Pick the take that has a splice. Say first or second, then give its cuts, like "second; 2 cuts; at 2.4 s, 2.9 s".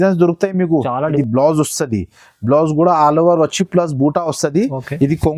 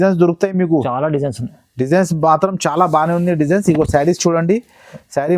first; 1 cut; at 1.1 s